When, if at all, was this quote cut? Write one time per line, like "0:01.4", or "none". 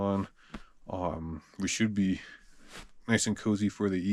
none